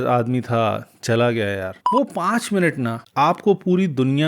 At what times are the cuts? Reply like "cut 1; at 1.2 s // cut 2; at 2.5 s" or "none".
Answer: cut 1; at 1.8 s